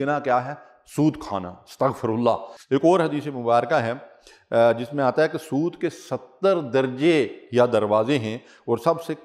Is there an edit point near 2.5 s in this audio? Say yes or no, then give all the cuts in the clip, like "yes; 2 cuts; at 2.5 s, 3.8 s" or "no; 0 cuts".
yes; 1 cut; at 2.5 s